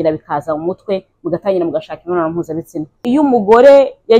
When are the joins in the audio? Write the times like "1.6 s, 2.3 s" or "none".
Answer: 3.0 s